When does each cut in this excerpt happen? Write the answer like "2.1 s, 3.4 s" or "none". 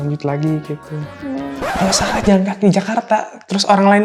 1.5 s